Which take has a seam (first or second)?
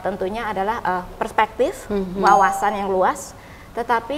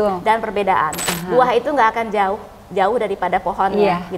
second